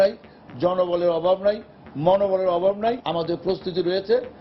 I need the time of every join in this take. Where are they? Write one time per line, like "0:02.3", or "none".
0:03.0